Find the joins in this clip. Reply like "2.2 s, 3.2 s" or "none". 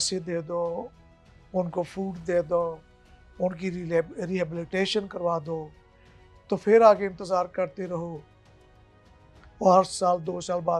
none